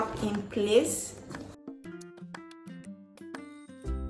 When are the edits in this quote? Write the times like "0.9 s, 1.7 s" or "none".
1.4 s